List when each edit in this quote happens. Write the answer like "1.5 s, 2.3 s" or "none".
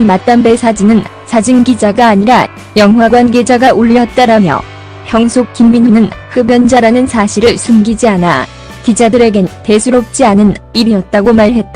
1.1 s